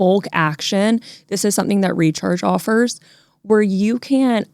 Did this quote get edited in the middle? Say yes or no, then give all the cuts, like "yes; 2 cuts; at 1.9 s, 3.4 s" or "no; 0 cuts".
no; 0 cuts